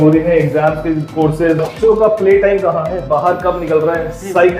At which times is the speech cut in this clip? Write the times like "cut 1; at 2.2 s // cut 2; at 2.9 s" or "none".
cut 1; at 1.7 s